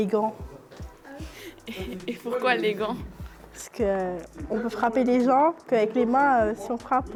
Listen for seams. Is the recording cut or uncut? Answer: uncut